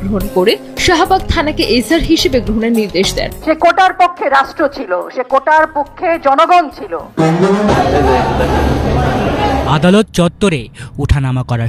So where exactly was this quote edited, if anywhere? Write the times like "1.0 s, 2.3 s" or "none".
7.7 s

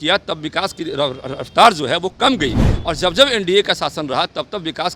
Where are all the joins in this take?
none

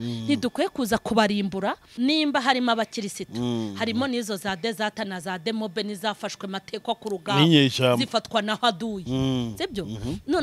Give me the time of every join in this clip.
1.9 s

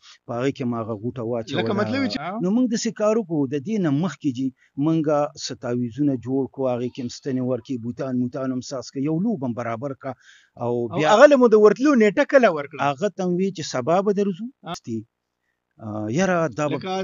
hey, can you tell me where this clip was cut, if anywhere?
2.2 s, 14.7 s

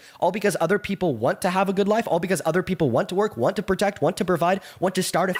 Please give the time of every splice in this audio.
none

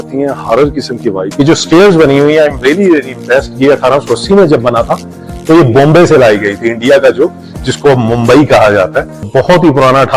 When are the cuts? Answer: 1.2 s, 9.2 s

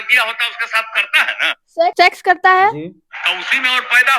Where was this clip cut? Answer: 1.9 s

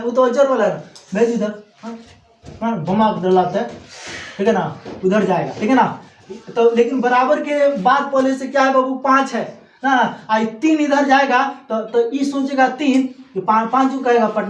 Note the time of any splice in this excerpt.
none

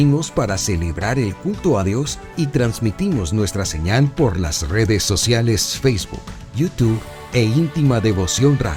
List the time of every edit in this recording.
none

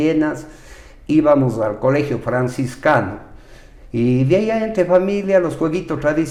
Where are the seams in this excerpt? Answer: none

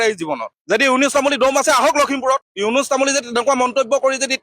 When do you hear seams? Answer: none

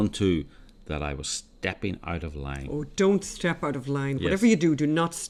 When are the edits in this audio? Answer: none

